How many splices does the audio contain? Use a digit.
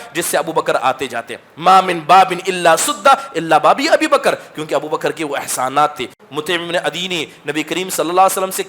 1